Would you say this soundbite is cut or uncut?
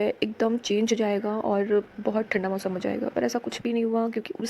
uncut